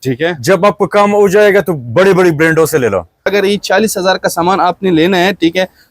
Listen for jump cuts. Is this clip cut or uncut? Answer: cut